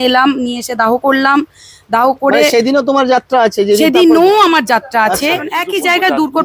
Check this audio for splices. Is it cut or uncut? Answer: cut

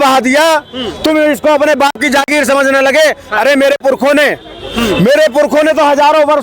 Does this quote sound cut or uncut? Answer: uncut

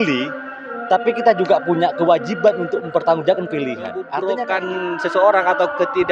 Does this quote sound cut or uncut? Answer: cut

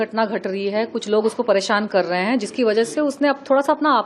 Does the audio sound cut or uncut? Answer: uncut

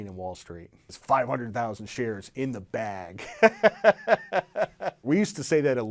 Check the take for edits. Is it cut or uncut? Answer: cut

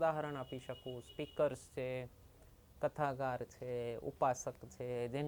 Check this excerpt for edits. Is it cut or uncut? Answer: uncut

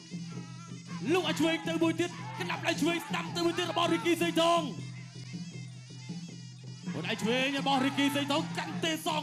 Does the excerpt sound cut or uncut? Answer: uncut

